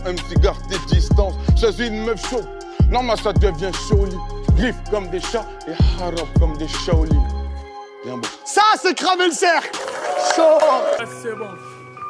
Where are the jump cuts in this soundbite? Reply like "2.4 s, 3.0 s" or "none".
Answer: 11.0 s

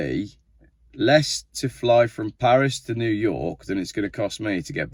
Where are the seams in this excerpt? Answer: none

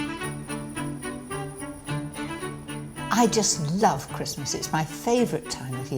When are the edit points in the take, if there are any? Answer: 3.1 s

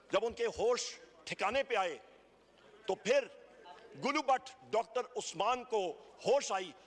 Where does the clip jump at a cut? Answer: none

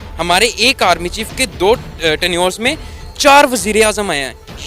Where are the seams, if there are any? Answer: 1.5 s

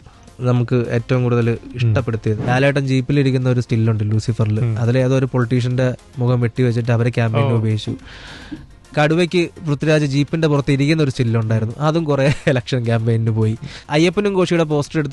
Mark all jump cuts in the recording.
2.4 s, 13.8 s

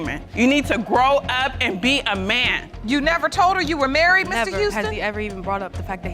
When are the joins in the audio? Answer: 2.6 s

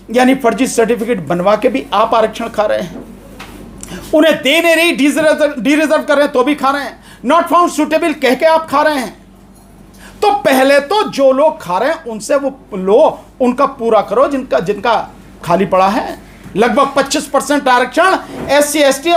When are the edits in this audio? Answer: none

